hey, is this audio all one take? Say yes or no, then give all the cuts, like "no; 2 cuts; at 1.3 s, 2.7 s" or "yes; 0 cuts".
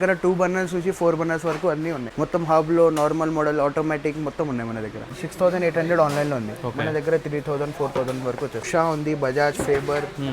no; 3 cuts; at 2.1 s, 5.1 s, 8.7 s